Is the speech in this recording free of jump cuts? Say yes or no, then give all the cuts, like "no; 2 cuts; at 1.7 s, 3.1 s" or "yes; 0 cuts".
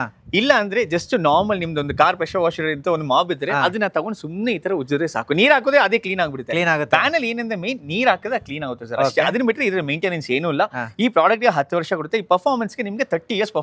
yes; 0 cuts